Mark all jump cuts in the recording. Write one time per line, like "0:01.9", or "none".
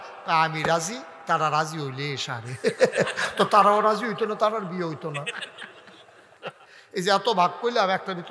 0:06.4